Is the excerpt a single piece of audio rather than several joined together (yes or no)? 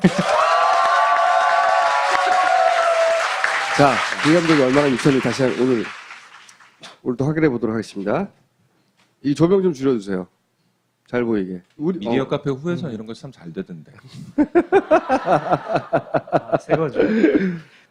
yes